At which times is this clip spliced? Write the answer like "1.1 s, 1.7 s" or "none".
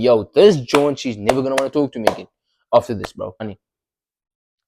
3.5 s